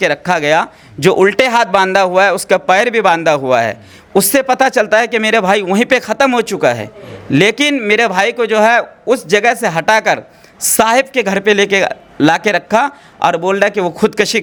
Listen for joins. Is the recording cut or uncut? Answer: uncut